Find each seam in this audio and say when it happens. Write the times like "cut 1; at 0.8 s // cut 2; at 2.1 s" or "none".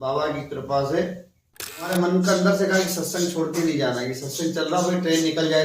cut 1; at 1.9 s